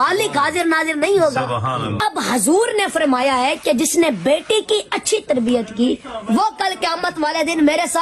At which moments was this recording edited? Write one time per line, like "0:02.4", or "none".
0:02.0